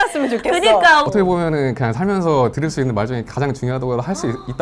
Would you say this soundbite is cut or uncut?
cut